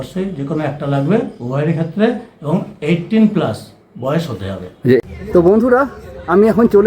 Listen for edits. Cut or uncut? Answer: cut